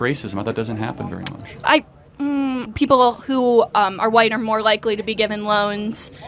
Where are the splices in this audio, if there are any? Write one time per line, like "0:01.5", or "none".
0:02.6